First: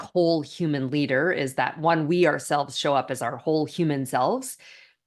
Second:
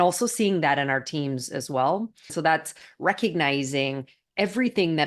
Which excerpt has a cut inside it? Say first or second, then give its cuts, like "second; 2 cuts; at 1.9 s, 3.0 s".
second; 1 cut; at 2.3 s